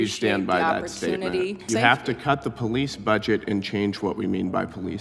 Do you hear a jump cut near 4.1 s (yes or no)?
no